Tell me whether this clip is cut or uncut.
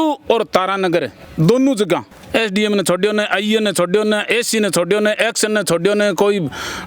cut